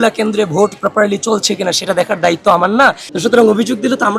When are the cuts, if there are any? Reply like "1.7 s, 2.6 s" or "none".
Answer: 3.0 s